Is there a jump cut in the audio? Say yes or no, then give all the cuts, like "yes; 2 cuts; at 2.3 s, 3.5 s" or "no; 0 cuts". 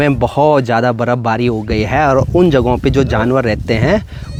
no; 0 cuts